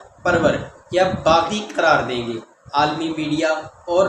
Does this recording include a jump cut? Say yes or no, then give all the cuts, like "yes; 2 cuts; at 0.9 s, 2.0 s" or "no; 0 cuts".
no; 0 cuts